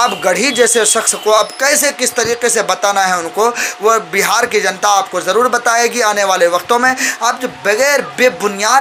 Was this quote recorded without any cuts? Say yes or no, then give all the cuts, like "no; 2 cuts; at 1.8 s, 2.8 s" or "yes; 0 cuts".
yes; 0 cuts